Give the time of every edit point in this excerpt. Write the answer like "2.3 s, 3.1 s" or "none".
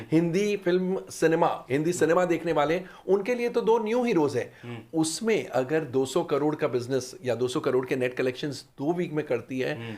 none